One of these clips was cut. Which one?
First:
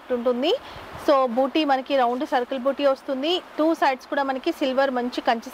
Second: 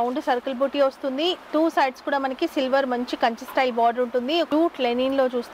second; 1 cut; at 4.5 s

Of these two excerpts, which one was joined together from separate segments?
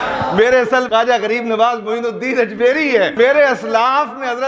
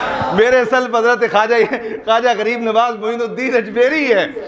first; 2 cuts; at 0.9 s, 3.1 s

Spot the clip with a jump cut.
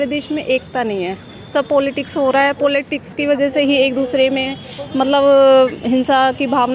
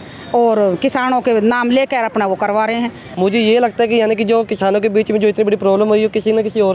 second; 1 cut; at 3.0 s

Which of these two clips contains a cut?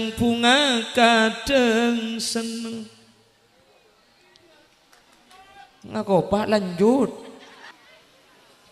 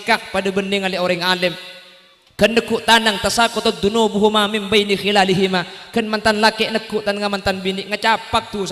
first; 1 cut; at 7.7 s

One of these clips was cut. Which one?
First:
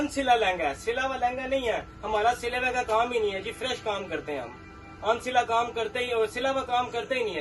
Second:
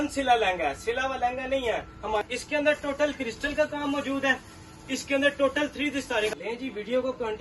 second; 2 cuts; at 2.2 s, 6.3 s

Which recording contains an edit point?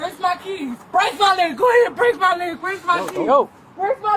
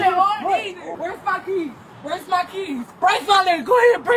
second; 1 cut; at 0.9 s

